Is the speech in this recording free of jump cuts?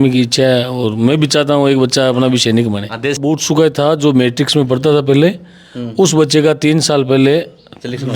no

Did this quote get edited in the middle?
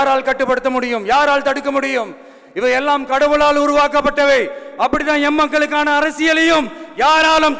no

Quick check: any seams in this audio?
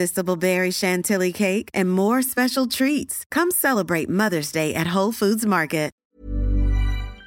yes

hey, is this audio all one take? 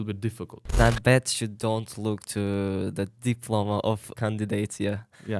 no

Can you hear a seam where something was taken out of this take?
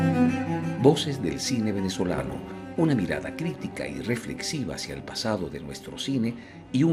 no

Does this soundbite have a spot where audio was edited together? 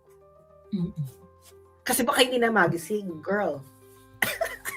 no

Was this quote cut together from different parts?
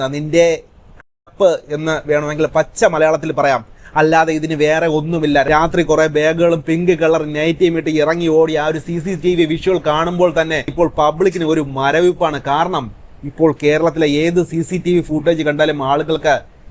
no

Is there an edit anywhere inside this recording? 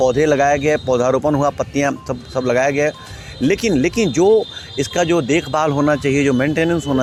no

